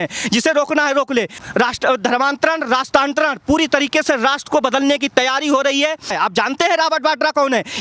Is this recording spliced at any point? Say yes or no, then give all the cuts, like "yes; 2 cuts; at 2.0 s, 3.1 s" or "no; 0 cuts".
yes; 2 cuts; at 1.3 s, 6.1 s